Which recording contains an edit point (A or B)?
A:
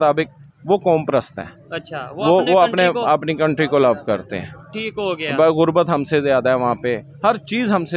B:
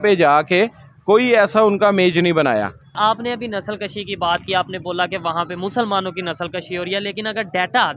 B